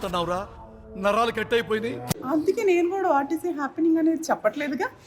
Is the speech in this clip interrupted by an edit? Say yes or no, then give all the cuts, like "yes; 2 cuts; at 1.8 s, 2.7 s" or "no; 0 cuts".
yes; 1 cut; at 2.2 s